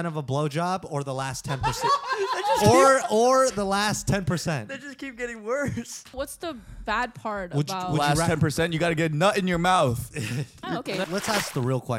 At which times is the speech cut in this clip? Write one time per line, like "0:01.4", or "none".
0:06.1
0:11.0